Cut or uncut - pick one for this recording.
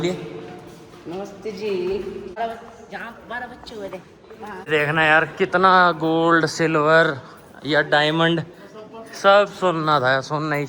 cut